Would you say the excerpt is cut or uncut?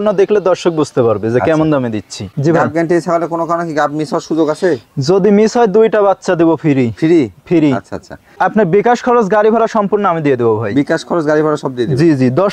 cut